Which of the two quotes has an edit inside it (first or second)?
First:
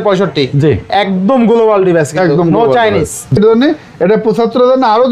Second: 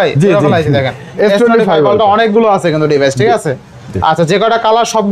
first